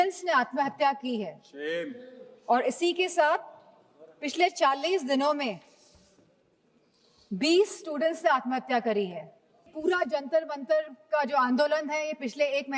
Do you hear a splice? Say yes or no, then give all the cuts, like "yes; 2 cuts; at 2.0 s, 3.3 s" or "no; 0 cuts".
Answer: yes; 1 cut; at 9.7 s